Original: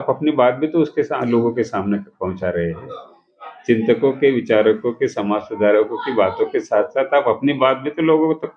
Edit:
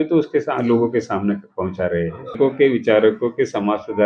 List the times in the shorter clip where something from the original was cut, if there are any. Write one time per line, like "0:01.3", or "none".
0:02.4